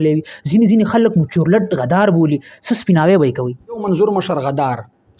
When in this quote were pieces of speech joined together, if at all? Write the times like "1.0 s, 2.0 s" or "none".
3.8 s